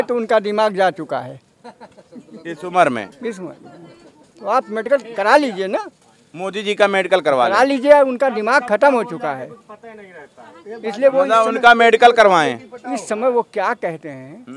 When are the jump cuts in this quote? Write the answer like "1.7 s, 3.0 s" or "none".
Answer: none